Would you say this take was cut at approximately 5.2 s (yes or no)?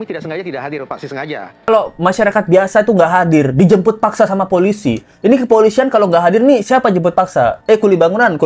no